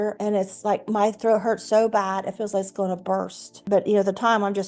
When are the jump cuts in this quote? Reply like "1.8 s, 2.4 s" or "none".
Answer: 3.5 s